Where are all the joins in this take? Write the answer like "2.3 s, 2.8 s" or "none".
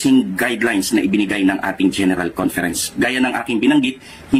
none